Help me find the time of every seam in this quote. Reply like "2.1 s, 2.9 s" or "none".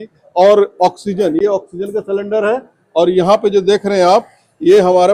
none